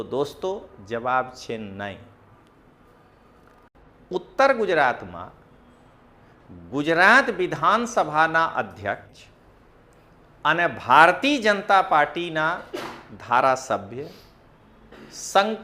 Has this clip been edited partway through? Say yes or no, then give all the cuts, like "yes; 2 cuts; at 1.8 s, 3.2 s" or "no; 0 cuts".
yes; 1 cut; at 3.7 s